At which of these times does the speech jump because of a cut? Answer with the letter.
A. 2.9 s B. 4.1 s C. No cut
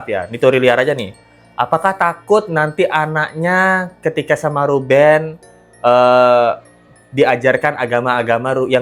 C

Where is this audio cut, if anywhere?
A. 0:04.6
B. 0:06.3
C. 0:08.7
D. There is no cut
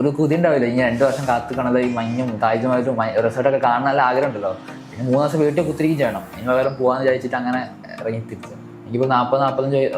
C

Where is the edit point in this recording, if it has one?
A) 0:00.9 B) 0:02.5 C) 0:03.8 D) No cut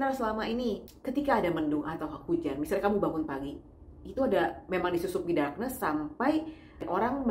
A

